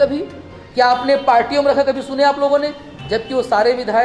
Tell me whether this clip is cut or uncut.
uncut